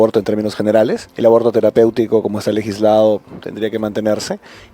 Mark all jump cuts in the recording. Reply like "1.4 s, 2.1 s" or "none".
1.0 s